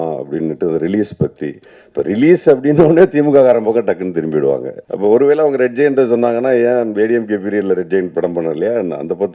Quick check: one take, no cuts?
no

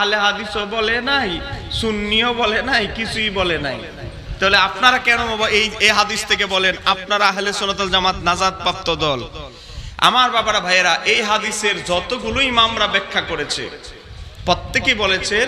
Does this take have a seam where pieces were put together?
no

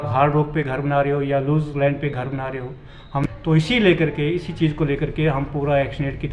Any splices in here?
yes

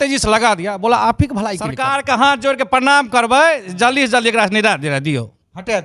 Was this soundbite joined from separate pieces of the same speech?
yes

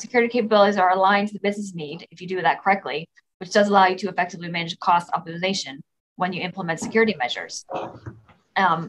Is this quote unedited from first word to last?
yes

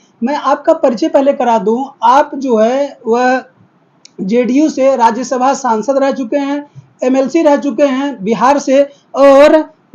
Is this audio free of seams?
yes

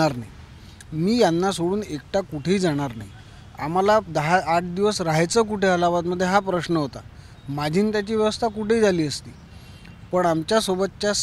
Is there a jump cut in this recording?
no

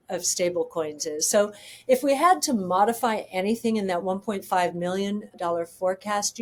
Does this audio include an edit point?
no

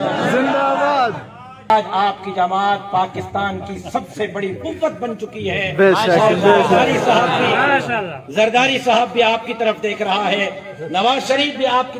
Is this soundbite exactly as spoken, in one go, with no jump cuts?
no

